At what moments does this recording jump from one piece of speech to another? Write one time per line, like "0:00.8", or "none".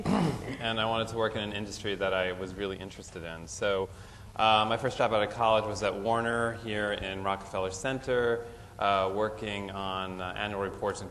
none